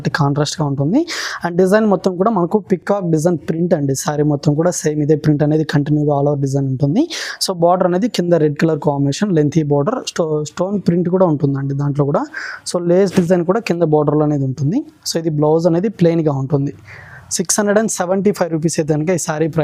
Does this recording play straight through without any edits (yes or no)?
yes